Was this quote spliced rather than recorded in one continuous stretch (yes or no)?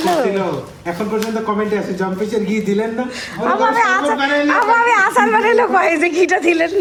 no